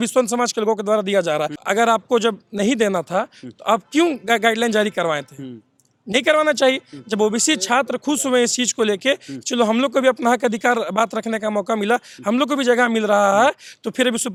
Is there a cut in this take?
no; 0 cuts

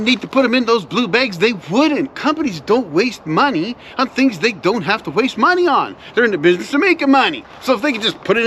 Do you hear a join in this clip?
no; 0 cuts

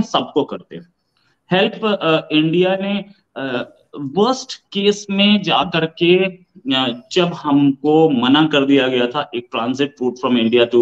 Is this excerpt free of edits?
yes; 0 cuts

